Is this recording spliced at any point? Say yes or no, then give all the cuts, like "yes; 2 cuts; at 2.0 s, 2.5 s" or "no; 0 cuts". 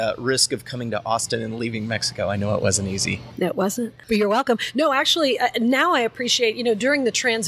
yes; 1 cut; at 3.8 s